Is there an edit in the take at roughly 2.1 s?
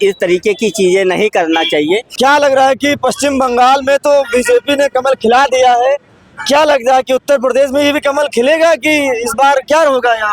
yes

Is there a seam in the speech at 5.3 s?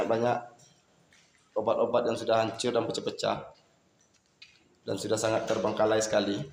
no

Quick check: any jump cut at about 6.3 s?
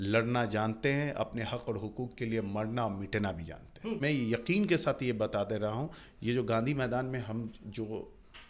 no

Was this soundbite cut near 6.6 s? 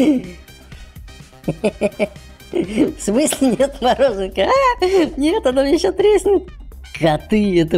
yes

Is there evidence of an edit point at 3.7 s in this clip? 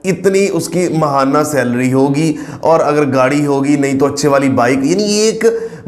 no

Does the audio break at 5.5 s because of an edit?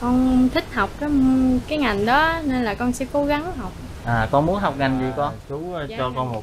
yes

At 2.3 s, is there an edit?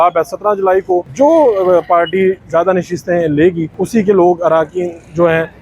no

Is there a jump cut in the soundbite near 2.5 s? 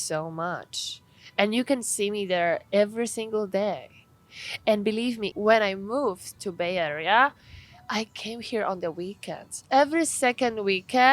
no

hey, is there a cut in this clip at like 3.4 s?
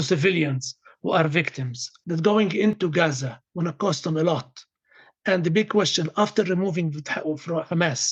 no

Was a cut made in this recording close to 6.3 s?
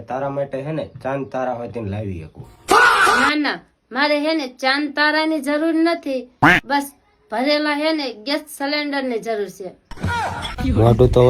no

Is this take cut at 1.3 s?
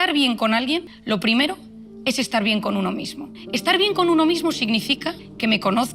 no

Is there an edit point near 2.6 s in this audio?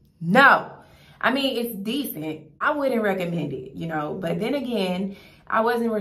yes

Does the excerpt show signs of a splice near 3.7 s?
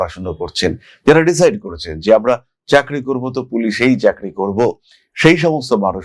no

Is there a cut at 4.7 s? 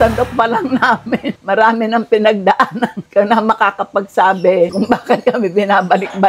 no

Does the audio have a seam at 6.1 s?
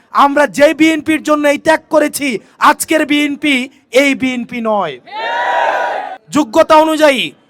yes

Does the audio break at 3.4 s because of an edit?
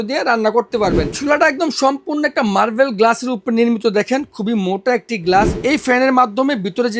no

